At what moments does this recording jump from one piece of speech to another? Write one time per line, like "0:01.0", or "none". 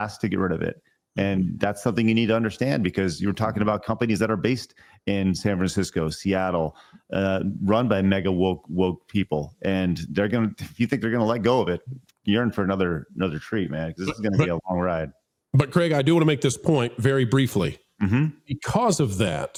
none